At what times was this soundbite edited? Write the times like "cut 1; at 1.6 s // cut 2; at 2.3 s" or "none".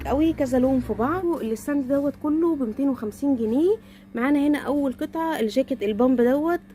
cut 1; at 1.1 s

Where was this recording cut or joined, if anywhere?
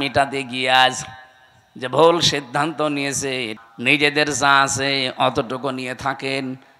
cut 1; at 3.5 s

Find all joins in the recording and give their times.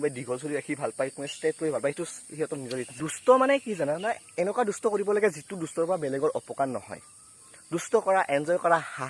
cut 1; at 2.8 s

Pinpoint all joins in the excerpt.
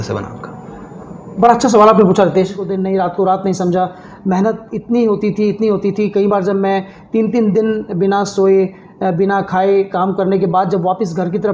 cut 1; at 2.6 s

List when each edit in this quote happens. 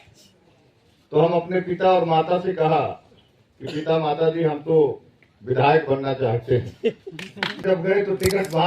cut 1; at 7.6 s

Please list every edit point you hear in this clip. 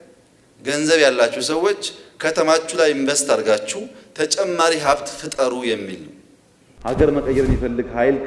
cut 1; at 6.7 s

